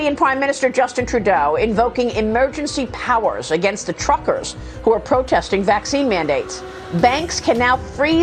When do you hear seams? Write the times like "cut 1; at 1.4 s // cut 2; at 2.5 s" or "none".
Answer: none